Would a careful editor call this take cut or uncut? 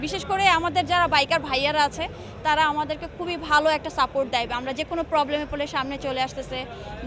uncut